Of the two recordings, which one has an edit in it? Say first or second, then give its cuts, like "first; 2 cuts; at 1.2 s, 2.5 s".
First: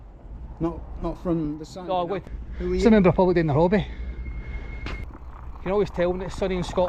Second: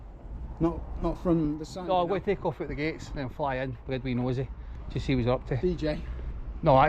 first; 2 cuts; at 2.3 s, 5.0 s